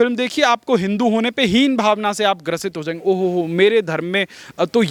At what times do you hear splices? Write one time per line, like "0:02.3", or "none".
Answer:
none